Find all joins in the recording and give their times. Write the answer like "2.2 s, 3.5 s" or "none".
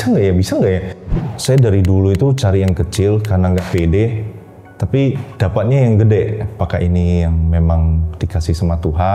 1.1 s, 5.3 s, 6.6 s